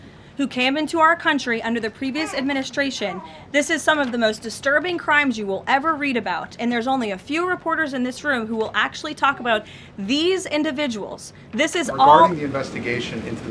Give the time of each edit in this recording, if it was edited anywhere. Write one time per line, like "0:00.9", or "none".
0:12.3

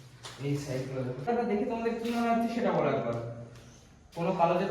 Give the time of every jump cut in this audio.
0:01.2

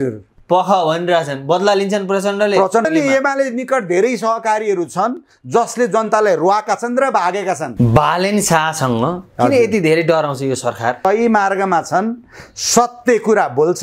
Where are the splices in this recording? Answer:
0:02.9
0:07.7
0:11.0

